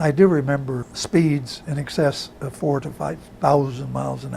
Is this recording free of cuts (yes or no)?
no